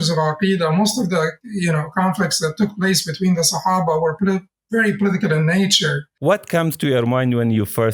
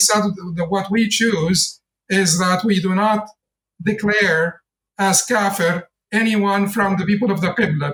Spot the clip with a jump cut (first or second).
first